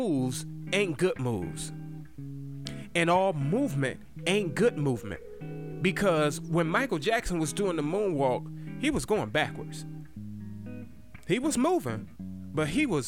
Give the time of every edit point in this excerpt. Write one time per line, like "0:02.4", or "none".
none